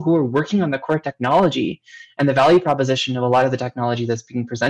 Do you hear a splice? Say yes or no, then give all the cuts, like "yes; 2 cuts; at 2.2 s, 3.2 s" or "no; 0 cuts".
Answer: no; 0 cuts